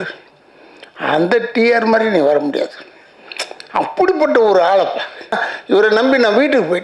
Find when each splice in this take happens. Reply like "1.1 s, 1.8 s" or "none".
5.4 s